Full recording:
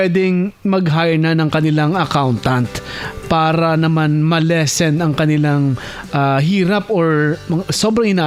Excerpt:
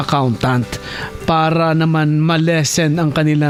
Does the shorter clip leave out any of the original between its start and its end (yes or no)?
no